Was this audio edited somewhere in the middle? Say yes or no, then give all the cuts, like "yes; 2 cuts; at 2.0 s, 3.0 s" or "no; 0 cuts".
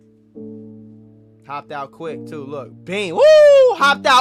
no; 0 cuts